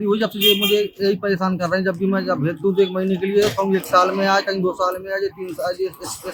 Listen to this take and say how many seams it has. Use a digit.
0